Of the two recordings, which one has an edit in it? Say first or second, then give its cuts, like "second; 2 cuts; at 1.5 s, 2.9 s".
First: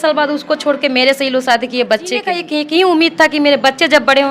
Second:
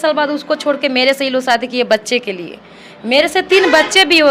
first; 1 cut; at 2.5 s